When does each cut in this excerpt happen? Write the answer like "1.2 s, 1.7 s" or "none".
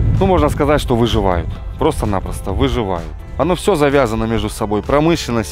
3.2 s